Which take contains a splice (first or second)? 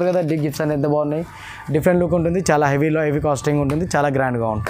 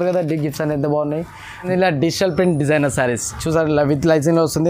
second